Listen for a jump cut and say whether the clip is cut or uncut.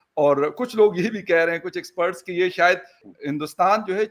cut